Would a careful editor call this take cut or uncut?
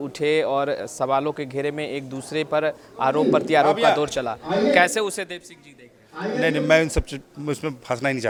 uncut